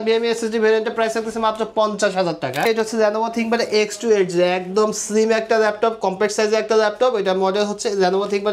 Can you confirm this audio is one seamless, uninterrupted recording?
no; 1 cut; at 2.7 s

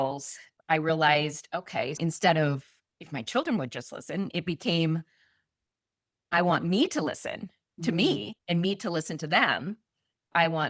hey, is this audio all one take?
yes; 0 cuts

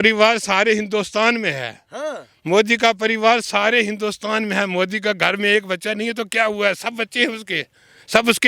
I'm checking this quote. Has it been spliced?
no; 0 cuts

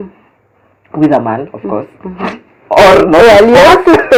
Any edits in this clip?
no; 0 cuts

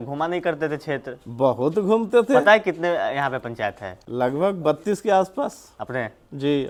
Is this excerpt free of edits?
yes; 0 cuts

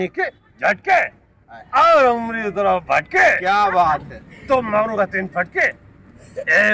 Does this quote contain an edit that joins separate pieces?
no; 0 cuts

